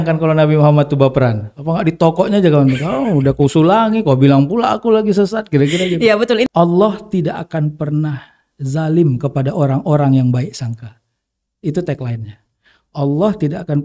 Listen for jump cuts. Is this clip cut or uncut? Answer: cut